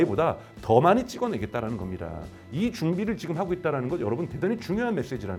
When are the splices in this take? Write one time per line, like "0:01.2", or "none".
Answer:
none